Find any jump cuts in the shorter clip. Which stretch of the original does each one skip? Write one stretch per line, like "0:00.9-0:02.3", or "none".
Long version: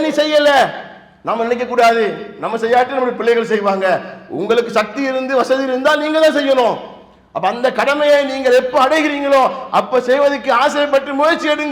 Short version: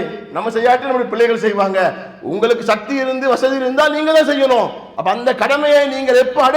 0:06.9-0:07.2